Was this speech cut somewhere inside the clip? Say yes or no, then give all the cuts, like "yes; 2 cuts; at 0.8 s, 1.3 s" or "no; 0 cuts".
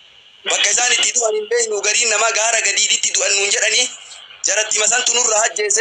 no; 0 cuts